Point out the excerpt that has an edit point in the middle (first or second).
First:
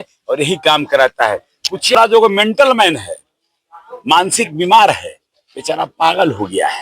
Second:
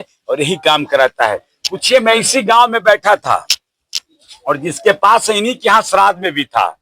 first